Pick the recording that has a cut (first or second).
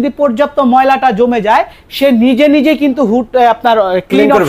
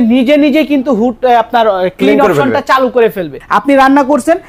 second